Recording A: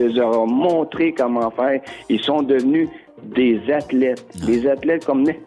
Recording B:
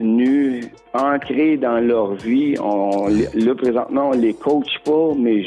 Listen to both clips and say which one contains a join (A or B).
A